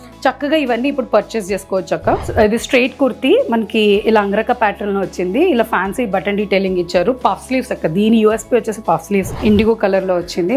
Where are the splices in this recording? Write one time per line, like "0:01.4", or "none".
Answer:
0:02.2
0:09.3